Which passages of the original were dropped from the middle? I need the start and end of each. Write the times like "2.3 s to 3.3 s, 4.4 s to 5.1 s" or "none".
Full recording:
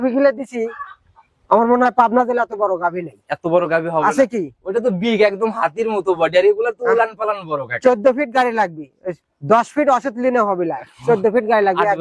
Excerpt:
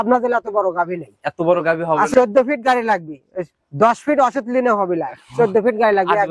4.1 s to 7.8 s